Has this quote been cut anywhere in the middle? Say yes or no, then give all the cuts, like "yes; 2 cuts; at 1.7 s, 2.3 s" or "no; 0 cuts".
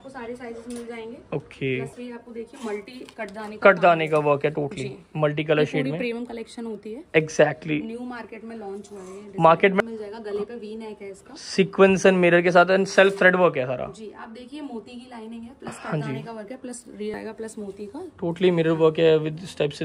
yes; 3 cuts; at 1.9 s, 9.8 s, 17.1 s